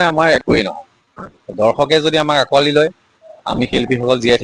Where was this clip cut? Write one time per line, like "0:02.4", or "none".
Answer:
none